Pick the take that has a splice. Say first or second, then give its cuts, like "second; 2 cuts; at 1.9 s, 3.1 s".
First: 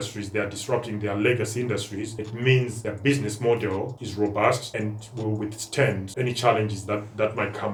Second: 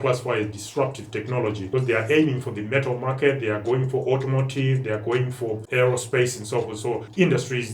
second; 2 cuts; at 1.6 s, 5.6 s